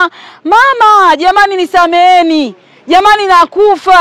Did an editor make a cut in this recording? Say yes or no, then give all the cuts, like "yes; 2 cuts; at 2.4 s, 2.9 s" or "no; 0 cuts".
no; 0 cuts